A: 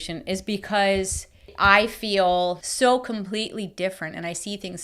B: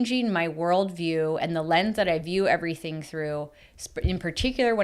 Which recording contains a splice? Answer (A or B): A